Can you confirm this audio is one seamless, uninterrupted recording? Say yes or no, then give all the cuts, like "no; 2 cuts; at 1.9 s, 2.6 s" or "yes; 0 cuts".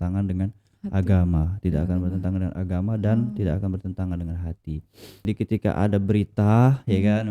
no; 1 cut; at 5.2 s